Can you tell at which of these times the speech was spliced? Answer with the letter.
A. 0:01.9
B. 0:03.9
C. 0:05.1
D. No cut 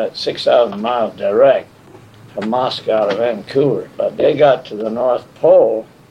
B